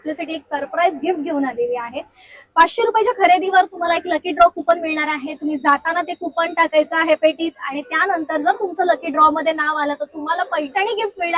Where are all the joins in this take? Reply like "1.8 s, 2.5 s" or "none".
none